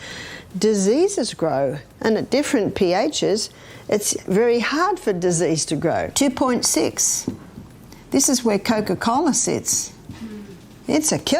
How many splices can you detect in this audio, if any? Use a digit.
1